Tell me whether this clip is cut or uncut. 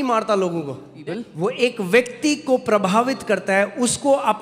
cut